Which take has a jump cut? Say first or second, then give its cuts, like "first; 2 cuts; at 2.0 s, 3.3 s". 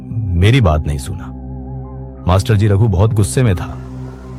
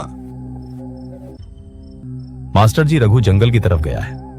second; 1 cut; at 2.0 s